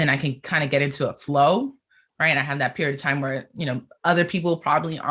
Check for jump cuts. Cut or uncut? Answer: uncut